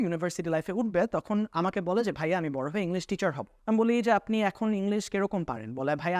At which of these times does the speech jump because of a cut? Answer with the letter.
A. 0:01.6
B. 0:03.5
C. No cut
B